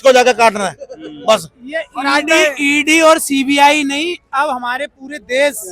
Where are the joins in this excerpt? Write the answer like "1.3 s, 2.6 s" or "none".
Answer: none